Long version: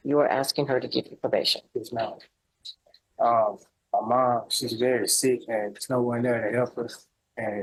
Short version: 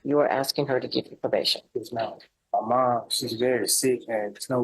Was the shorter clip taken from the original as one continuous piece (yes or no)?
no